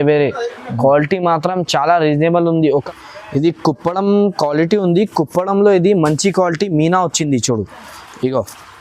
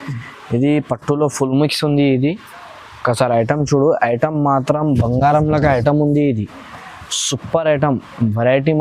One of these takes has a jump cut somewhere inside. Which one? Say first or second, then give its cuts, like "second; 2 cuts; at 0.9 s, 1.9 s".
first; 1 cut; at 2.9 s